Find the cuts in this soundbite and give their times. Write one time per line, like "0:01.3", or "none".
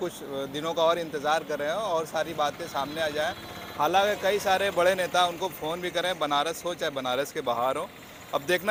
none